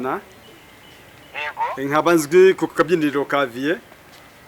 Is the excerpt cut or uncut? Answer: cut